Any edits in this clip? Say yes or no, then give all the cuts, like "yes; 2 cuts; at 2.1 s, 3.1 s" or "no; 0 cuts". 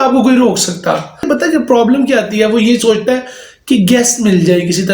yes; 1 cut; at 1.2 s